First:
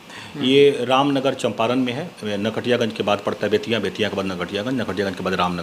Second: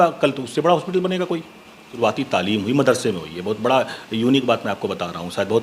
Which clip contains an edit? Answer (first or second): second